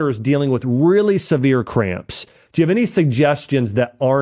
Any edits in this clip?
no; 0 cuts

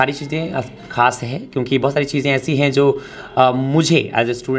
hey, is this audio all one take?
yes; 0 cuts

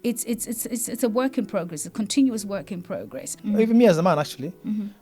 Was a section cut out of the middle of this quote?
yes; 1 cut; at 3.3 s

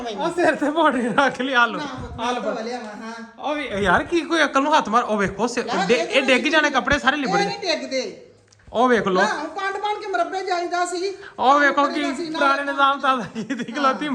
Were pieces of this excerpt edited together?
no; 0 cuts

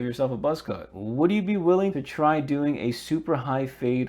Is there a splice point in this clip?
yes; 1 cut; at 0.9 s

